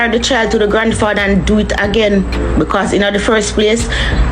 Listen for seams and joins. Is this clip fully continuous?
yes; 0 cuts

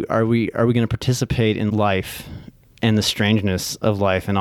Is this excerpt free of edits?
no; 1 cut; at 1.7 s

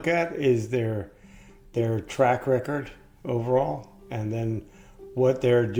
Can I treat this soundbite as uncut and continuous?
yes; 0 cuts

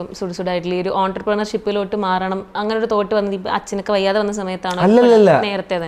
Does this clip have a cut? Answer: no; 0 cuts

